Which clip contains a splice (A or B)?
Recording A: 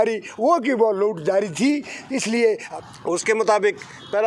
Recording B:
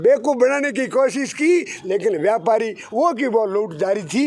A